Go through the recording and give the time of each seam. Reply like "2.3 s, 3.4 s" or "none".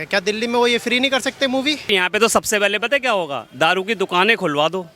1.9 s